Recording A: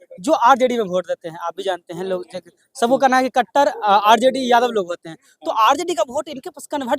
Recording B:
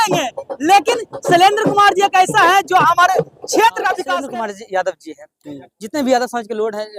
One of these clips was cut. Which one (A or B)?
B